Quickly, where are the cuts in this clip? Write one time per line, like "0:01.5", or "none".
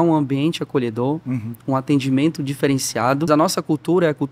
0:03.3

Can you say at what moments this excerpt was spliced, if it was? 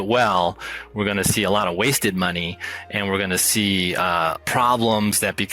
0:04.4

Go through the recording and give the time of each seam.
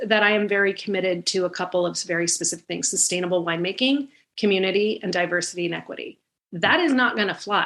none

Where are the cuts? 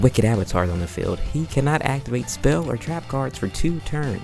none

